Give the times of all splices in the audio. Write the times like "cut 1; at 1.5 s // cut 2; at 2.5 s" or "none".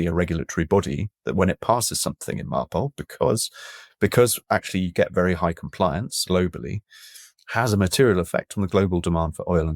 cut 1; at 6.1 s